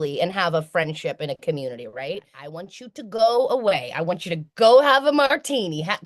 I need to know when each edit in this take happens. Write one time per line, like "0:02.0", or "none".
0:02.5